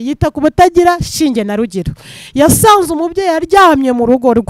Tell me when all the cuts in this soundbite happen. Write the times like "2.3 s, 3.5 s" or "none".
none